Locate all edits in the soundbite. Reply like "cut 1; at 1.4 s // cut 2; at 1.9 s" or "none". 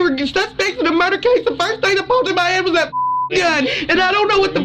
cut 1; at 3.7 s

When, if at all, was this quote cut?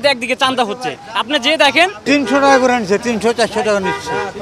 cut 1; at 2.0 s

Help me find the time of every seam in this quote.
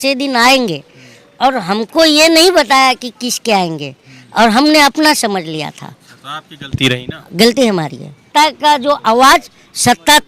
cut 1; at 8.3 s

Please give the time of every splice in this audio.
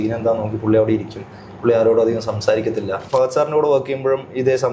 cut 1; at 3.0 s

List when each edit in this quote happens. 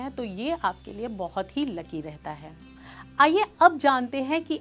none

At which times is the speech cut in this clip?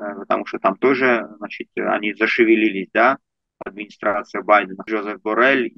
cut 1; at 4.9 s

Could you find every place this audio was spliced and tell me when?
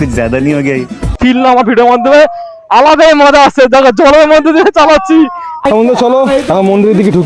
cut 1; at 1.1 s // cut 2; at 5.5 s

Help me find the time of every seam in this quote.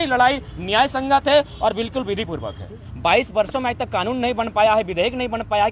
cut 1; at 2.9 s

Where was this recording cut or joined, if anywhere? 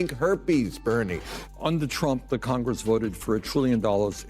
cut 1; at 1.3 s

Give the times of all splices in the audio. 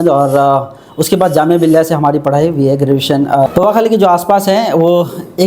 cut 1; at 3.5 s

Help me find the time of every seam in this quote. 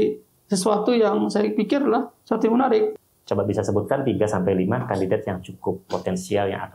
cut 1; at 2.9 s

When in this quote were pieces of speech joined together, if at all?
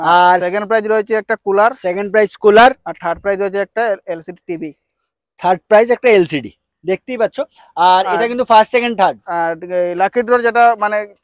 none

